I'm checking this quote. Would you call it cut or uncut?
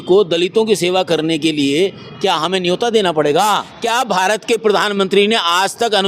cut